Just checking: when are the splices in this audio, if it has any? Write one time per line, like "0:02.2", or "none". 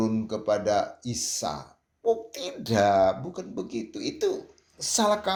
none

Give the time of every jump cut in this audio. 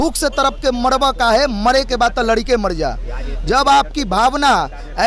none

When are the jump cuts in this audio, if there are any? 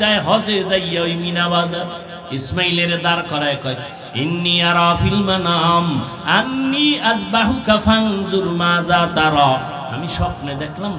0:02.1
0:03.9

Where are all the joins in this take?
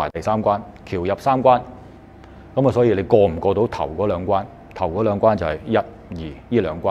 none

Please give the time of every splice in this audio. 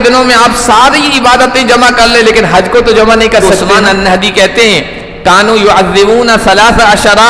0:03.4

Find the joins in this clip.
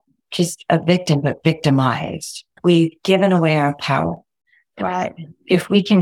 0:02.6

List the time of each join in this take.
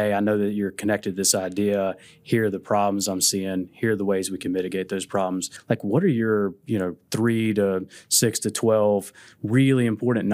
0:05.5

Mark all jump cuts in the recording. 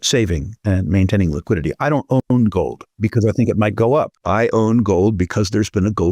0:02.8
0:04.2

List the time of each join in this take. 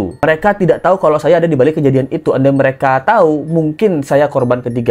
none

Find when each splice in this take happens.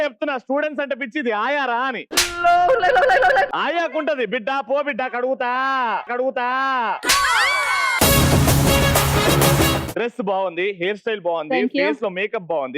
0:03.5
0:09.9

